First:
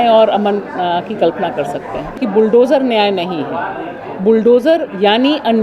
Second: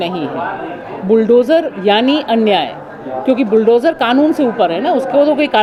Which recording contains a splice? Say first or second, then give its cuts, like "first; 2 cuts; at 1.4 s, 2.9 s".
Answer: first; 1 cut; at 2.2 s